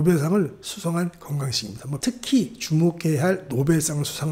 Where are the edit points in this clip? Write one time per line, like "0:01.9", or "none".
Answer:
0:02.0